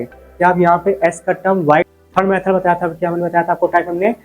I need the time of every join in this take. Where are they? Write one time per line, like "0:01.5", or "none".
0:01.9